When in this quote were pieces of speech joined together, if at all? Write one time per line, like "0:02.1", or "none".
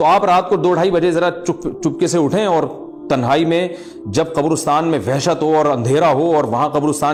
none

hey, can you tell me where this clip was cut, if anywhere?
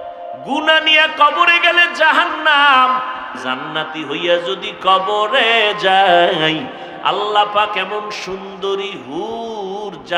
0:03.4

